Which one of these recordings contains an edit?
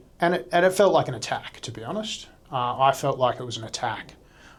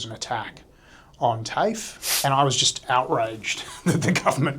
second; 1 cut; at 2.2 s

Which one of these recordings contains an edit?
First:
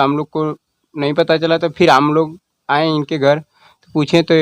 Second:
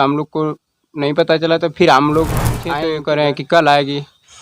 second; 1 cut; at 2.7 s

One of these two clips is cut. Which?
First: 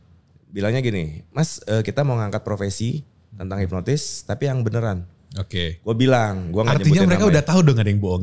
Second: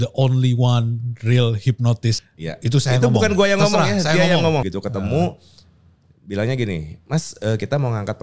second; 2 cuts; at 2.2 s, 4.7 s

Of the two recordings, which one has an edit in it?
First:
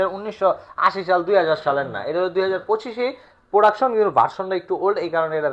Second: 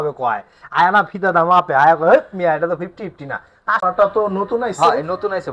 second; 1 cut; at 3.8 s

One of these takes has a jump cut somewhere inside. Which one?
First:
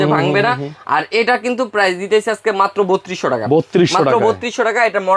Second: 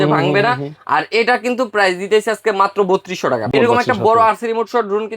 second; 1 cut; at 3.5 s

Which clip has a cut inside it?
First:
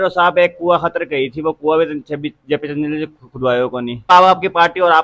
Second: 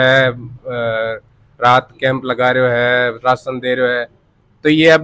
first; 1 cut; at 4.1 s

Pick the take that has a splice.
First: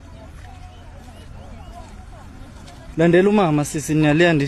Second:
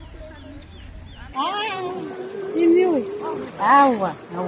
second; 1 cut; at 1.2 s

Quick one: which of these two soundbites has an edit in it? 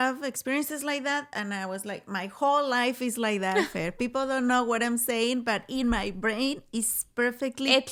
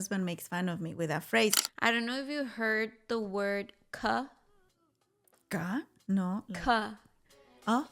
second; 1 cut; at 1.6 s

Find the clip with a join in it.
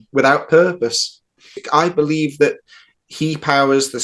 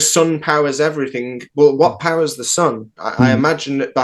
first; 1 cut; at 1.6 s

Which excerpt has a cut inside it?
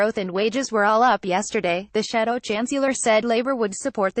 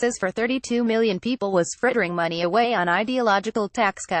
first; 1 cut; at 1.6 s

